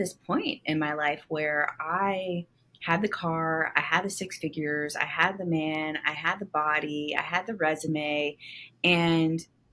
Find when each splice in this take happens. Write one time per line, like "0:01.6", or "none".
none